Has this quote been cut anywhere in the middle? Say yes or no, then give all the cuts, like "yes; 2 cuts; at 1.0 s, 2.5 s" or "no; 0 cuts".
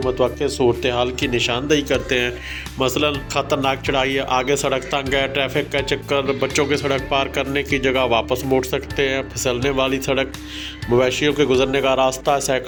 no; 0 cuts